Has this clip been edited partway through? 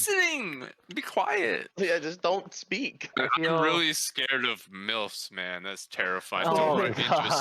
yes; 2 cuts; at 1.7 s, 3.1 s

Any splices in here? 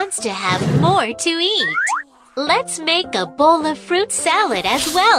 no; 0 cuts

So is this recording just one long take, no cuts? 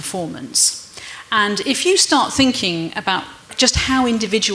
no; 1 cut; at 3.5 s

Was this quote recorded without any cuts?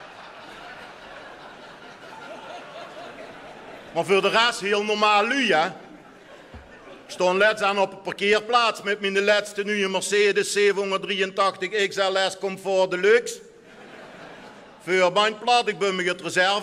no; 1 cut; at 15.1 s

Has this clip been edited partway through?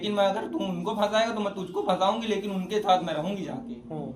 no; 0 cuts

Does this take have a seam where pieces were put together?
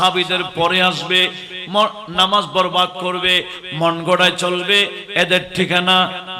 no; 0 cuts

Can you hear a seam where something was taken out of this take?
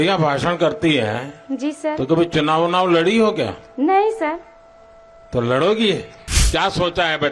yes; 1 cut; at 6.2 s

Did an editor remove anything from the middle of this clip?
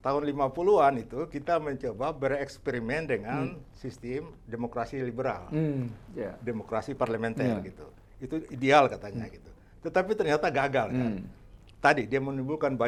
no; 0 cuts

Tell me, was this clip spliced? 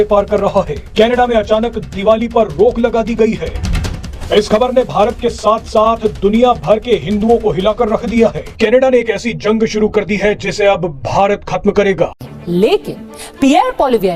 yes; 1 cut; at 12.2 s

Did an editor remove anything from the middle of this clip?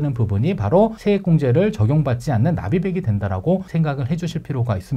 yes; 2 cuts; at 1.0 s, 3.7 s

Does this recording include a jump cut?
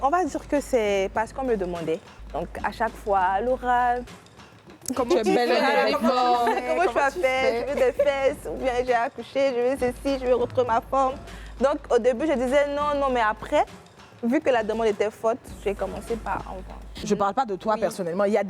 yes; 2 cuts; at 2.2 s, 17.0 s

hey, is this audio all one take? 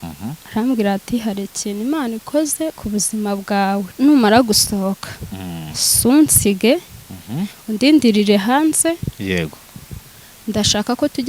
no; 1 cut; at 3.9 s

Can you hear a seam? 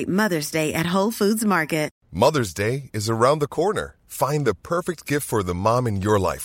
yes; 1 cut; at 2.0 s

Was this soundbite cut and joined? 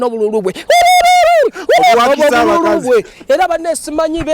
no; 0 cuts

